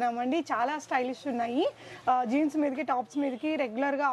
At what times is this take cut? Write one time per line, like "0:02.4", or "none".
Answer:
none